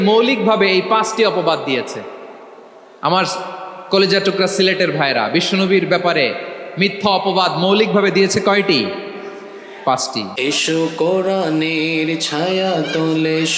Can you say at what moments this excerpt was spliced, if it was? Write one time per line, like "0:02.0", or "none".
0:10.2